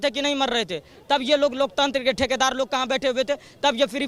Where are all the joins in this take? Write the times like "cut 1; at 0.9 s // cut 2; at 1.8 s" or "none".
none